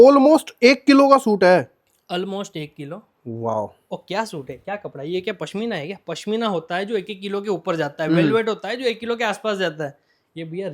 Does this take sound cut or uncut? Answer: uncut